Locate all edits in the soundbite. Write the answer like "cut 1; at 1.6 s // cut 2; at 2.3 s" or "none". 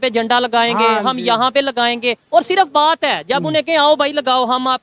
none